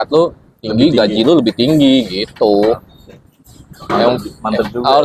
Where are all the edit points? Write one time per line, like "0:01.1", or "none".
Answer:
none